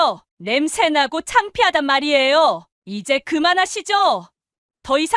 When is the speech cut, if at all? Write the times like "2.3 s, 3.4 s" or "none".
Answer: 2.7 s